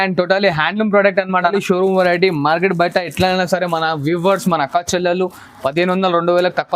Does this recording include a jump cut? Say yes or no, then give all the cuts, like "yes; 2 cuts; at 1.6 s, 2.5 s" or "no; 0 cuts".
yes; 1 cut; at 1.4 s